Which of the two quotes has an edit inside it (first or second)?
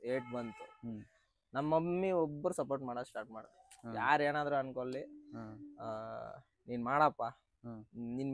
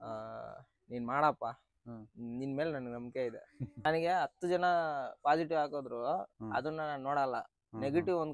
second